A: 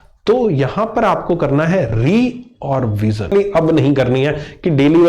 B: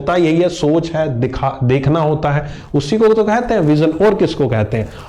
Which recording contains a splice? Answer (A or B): A